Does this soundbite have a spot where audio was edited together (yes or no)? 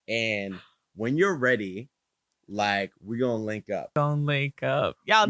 yes